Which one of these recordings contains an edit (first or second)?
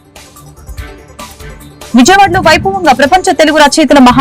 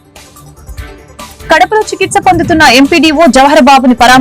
first